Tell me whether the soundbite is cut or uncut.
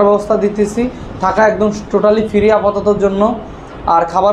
uncut